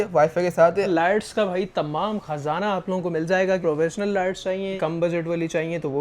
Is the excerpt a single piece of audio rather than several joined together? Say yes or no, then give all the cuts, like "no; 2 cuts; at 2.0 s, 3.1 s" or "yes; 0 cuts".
no; 2 cuts; at 0.9 s, 4.8 s